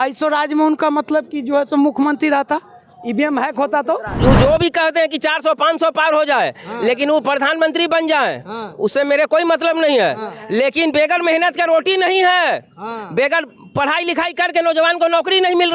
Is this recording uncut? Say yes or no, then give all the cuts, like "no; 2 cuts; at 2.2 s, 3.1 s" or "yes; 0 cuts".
no; 1 cut; at 4.2 s